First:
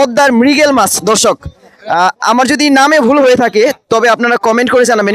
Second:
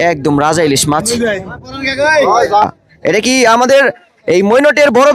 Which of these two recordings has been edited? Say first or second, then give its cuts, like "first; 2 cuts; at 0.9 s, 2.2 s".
second; 1 cut; at 2.6 s